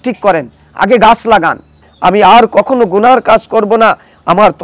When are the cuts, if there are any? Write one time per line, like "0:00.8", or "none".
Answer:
0:01.9